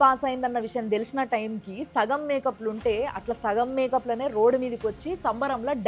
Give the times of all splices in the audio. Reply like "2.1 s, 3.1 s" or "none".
none